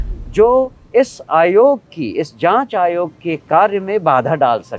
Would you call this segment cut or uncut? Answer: uncut